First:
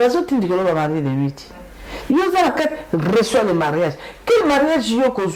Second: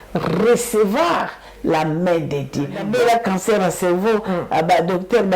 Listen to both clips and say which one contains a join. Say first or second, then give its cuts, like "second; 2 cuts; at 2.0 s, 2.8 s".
second; 1 cut; at 2.8 s